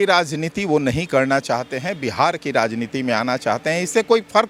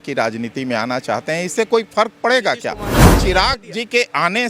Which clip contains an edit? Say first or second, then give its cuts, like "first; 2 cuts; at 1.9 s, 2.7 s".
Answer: second; 1 cut; at 3.2 s